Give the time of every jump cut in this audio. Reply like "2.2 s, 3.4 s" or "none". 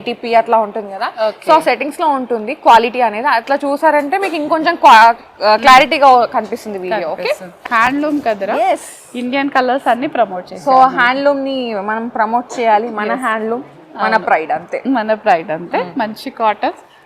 7.7 s